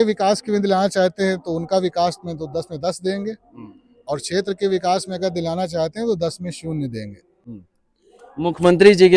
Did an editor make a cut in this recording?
no; 0 cuts

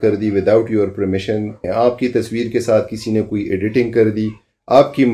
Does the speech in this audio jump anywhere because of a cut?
yes; 1 cut; at 1.6 s

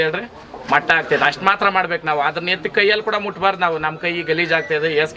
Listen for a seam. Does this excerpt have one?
no; 0 cuts

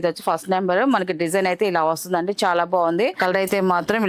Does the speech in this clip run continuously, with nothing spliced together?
no; 1 cut; at 3.2 s

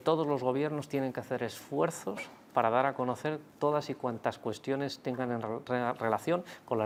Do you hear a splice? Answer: no; 0 cuts

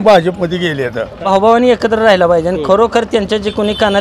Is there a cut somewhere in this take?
yes; 1 cut; at 1.2 s

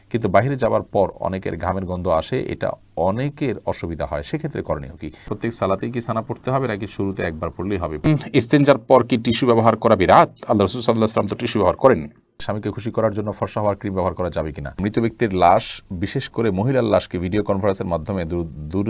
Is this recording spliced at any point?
yes; 4 cuts; at 5.3 s, 8.1 s, 12.4 s, 14.8 s

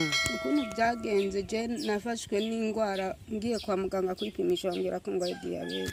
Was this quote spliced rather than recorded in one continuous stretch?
no; 0 cuts

